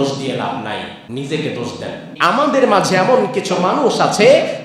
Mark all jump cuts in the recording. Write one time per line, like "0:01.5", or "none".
0:01.0
0:02.1